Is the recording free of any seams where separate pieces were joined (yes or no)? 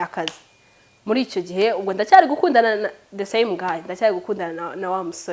yes